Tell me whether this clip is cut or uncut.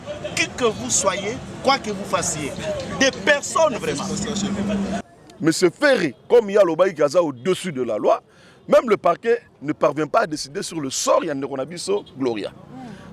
cut